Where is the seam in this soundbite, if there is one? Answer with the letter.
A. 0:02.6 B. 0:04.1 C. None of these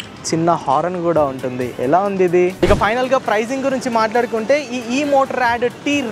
A